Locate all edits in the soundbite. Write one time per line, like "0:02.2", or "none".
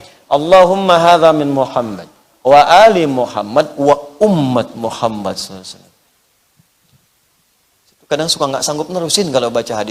none